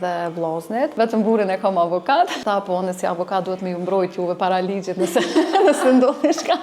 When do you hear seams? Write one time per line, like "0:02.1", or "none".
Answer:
0:00.9
0:02.4